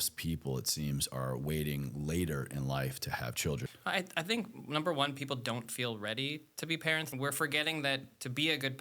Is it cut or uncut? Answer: cut